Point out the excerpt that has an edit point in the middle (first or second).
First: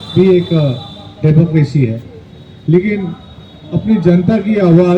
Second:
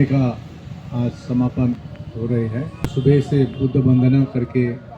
second